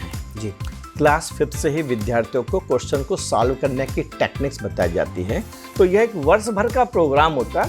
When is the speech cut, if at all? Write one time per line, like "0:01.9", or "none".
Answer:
0:05.6